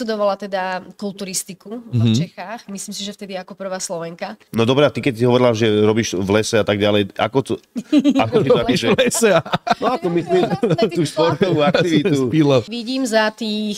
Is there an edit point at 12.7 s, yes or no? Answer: yes